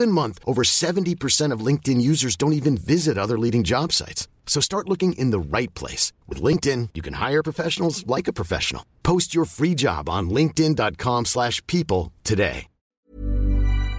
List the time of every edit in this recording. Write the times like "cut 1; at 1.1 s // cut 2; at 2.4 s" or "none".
cut 1; at 12.9 s